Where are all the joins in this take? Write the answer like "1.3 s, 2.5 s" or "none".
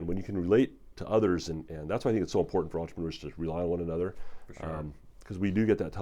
none